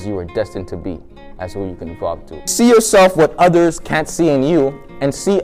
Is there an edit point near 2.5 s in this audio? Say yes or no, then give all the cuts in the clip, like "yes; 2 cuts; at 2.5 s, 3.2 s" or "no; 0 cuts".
yes; 1 cut; at 2.5 s